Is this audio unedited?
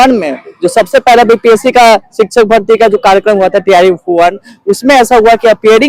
yes; 0 cuts

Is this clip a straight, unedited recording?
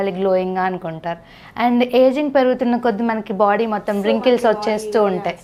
yes; 0 cuts

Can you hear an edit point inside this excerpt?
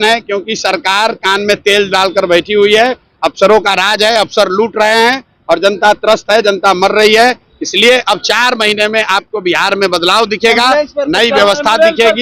no; 0 cuts

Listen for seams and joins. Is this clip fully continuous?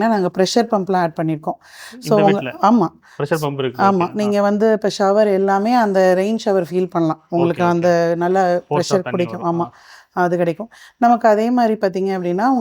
yes; 0 cuts

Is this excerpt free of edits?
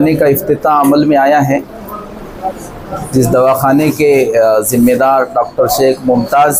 yes; 0 cuts

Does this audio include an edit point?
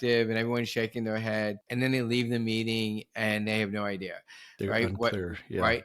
yes; 1 cut; at 1.6 s

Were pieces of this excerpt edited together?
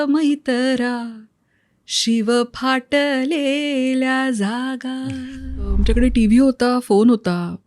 yes; 1 cut; at 5.7 s

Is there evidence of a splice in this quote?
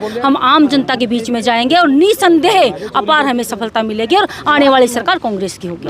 no; 0 cuts

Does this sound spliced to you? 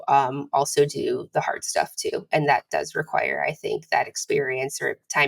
no; 0 cuts

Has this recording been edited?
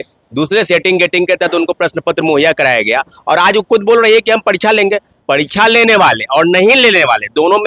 no; 0 cuts

